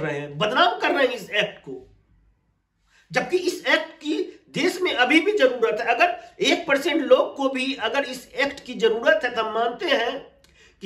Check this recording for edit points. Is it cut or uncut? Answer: uncut